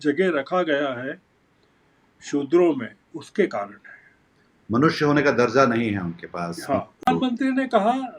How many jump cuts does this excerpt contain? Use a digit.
1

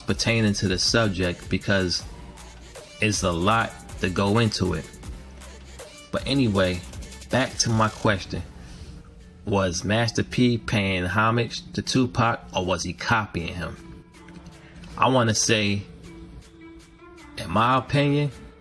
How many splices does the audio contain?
0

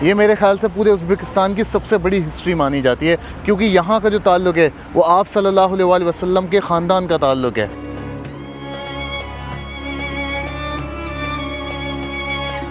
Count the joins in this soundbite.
1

